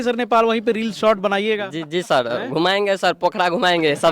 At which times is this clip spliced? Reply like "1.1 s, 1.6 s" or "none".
none